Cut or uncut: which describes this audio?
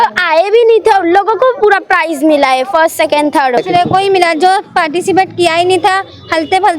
cut